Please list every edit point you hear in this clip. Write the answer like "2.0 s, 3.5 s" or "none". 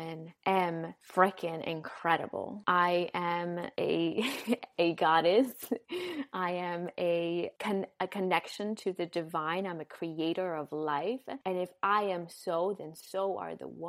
none